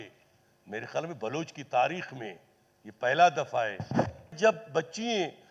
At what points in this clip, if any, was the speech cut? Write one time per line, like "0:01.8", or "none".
0:04.3